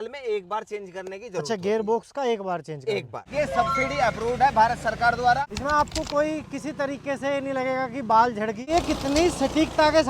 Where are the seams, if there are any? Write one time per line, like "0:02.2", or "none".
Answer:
0:03.3
0:05.4
0:08.7